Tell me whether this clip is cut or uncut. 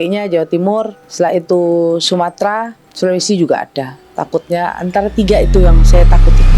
cut